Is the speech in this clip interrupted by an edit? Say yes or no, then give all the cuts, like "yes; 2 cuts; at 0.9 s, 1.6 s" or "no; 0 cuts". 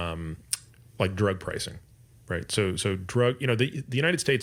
no; 0 cuts